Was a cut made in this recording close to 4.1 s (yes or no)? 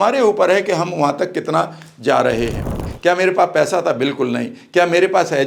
no